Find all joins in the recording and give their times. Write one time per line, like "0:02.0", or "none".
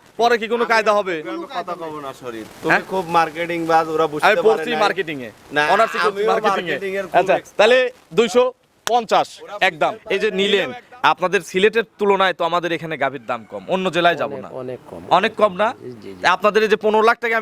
0:10.0